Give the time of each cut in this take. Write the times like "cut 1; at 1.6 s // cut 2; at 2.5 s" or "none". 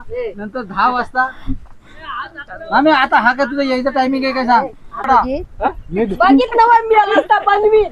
cut 1; at 5.1 s